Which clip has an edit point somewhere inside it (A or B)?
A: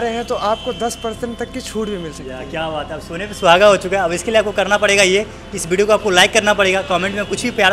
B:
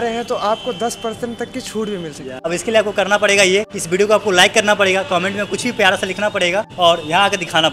B